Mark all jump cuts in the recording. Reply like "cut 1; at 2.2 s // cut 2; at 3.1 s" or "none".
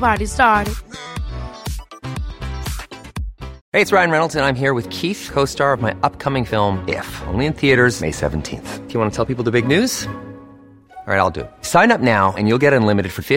cut 1; at 3.6 s